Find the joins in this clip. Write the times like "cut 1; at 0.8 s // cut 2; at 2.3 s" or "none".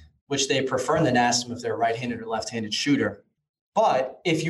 none